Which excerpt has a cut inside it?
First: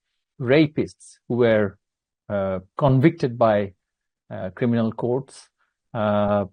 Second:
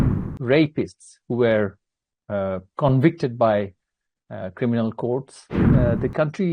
second; 1 cut; at 5.6 s

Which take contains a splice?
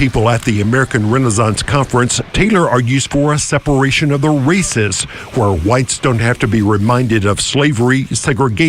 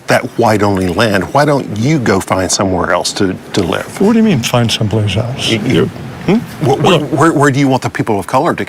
first; 1 cut; at 5.1 s

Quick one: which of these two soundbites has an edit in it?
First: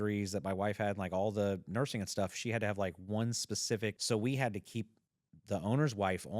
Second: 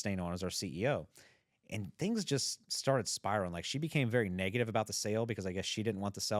first; 1 cut; at 4.0 s

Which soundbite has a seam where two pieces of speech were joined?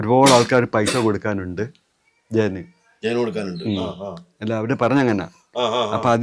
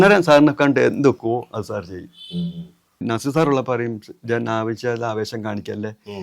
second; 1 cut; at 3.0 s

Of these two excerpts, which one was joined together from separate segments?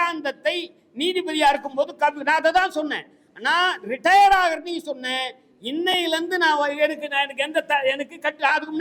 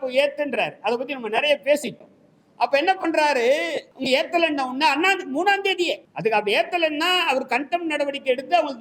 second; 2 cuts; at 3.9 s, 6.1 s

